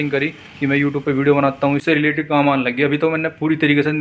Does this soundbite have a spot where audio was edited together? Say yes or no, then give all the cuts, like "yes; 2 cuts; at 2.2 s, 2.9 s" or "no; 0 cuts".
yes; 1 cut; at 1.8 s